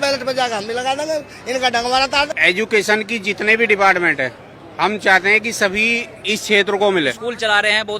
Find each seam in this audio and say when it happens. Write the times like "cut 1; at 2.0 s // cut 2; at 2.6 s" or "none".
cut 1; at 2.3 s // cut 2; at 7.2 s